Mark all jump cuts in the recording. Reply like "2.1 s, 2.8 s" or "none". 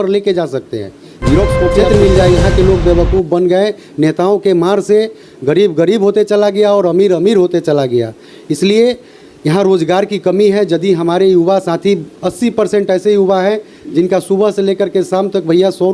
1.8 s